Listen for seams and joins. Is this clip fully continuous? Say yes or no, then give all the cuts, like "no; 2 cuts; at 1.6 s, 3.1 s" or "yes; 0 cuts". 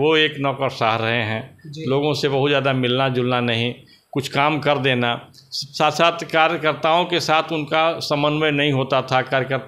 yes; 0 cuts